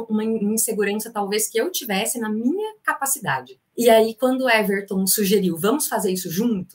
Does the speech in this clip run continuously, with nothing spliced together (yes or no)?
no